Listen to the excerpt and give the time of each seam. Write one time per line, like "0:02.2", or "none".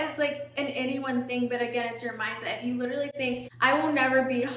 0:03.5